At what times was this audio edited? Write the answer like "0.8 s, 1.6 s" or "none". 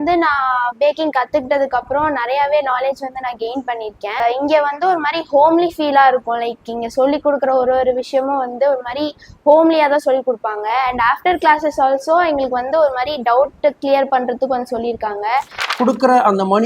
15.7 s